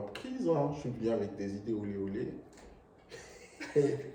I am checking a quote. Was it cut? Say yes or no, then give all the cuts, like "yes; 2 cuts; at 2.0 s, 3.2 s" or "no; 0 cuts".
no; 0 cuts